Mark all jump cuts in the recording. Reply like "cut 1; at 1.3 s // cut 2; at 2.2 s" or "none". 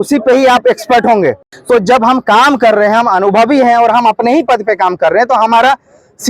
cut 1; at 1.5 s